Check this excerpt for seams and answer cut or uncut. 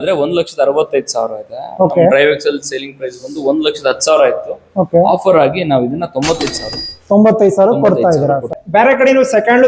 cut